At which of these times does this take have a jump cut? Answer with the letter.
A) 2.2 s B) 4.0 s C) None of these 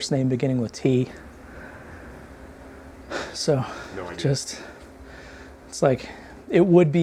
C